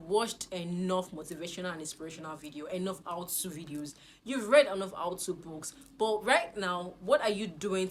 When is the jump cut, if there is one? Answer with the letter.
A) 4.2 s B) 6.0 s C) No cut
C